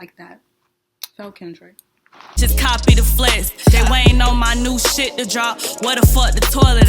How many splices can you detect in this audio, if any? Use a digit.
1